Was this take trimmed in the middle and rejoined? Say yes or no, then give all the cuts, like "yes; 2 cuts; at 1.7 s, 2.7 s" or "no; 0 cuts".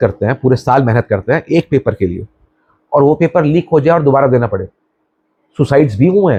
no; 0 cuts